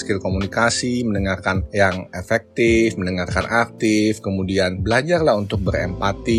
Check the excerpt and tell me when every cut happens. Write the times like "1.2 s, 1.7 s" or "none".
none